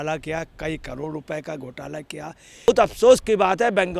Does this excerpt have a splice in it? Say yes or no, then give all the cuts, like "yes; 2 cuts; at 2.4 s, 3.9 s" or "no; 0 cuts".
yes; 1 cut; at 2.7 s